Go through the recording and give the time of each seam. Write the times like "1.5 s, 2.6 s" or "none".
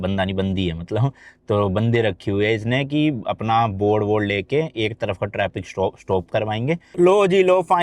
6.9 s